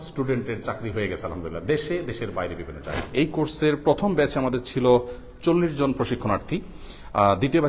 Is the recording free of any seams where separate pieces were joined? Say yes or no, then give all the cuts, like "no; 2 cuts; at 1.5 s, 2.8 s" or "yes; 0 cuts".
no; 1 cut; at 3.0 s